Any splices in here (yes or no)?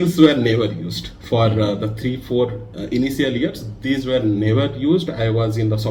no